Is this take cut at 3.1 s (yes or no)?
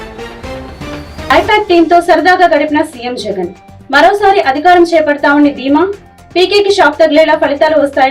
no